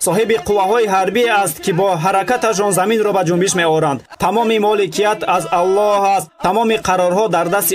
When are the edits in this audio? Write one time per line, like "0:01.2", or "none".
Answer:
0:04.1